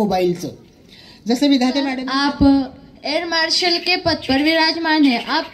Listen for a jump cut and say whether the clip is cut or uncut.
cut